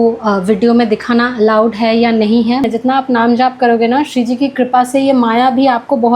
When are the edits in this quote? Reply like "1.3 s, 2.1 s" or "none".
2.6 s